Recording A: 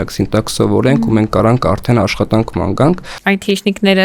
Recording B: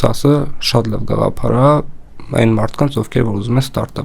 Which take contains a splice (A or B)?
A